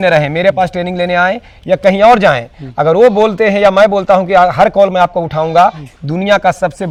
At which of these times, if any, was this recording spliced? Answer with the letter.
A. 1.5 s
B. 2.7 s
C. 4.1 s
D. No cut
D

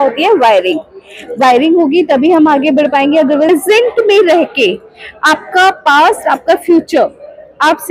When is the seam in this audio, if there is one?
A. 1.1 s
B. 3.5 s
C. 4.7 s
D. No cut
B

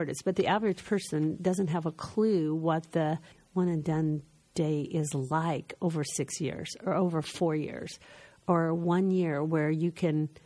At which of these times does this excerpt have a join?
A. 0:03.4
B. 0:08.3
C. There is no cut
A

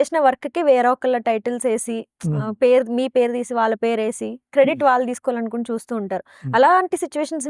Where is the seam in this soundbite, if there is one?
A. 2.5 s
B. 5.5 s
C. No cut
C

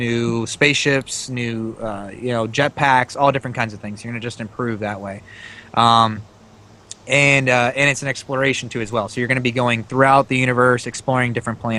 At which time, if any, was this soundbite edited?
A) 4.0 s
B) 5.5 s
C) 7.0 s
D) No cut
D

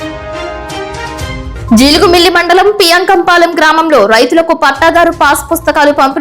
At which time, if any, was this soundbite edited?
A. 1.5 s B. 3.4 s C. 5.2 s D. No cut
A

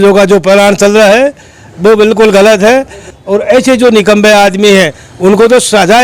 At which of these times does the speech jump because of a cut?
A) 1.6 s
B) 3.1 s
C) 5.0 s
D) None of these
B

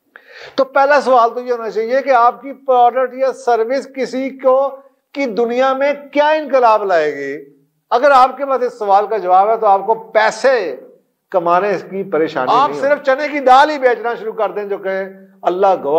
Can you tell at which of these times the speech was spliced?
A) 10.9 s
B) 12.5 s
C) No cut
B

